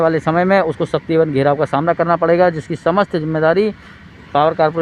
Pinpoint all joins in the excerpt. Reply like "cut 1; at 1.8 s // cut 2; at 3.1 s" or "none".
none